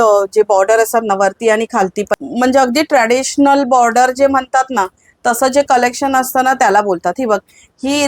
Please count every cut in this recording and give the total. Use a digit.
1